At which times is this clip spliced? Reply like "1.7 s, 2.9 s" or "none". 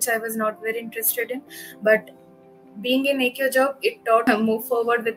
4.2 s